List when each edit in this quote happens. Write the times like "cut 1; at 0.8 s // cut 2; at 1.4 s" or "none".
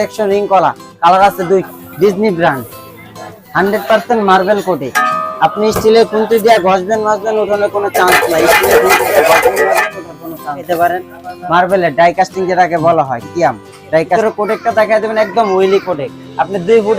cut 1; at 1.8 s // cut 2; at 10.7 s // cut 3; at 14.1 s